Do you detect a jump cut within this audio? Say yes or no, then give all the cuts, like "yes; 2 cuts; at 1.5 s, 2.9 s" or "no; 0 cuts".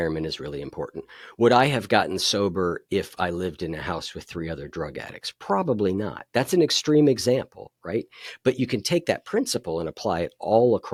no; 0 cuts